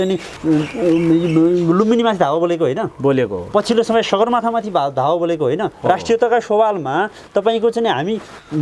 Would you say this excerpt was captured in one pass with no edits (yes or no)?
yes